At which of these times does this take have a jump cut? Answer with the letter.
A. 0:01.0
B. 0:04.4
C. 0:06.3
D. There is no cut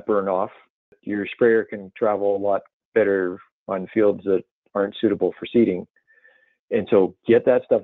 A